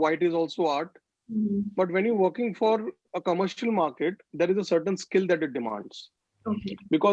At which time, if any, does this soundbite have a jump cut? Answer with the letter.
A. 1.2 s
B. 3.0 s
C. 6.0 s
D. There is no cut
D